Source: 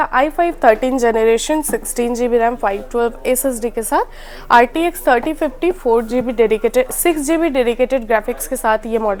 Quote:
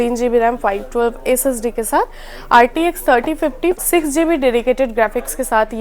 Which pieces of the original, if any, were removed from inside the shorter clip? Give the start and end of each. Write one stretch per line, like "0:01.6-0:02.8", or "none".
0:05.8-0:06.9